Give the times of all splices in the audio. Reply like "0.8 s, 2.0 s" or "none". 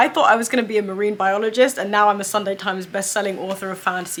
none